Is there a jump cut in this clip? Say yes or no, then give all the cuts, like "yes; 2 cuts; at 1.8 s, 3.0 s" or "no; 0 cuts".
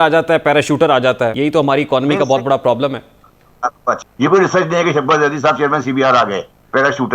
yes; 2 cuts; at 1.3 s, 4.1 s